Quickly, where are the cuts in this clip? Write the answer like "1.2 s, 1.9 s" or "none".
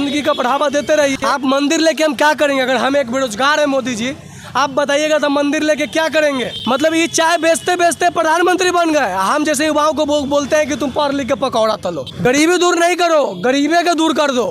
1.1 s, 6.5 s, 12.2 s